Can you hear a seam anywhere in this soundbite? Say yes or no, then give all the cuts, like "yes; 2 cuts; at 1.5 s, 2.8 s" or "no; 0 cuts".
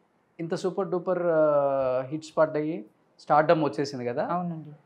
no; 0 cuts